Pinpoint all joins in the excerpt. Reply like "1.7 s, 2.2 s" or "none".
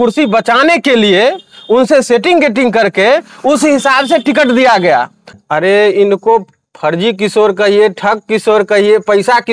5.3 s